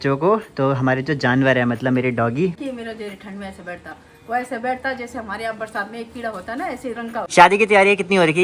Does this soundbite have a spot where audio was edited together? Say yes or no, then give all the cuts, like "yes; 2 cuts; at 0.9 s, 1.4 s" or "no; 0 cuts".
yes; 2 cuts; at 2.6 s, 7.3 s